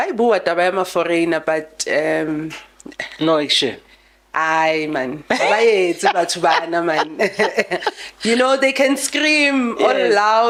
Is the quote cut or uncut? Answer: uncut